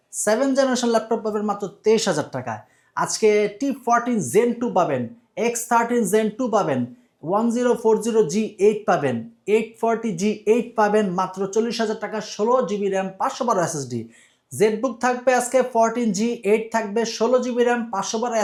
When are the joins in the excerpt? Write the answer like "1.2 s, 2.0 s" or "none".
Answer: none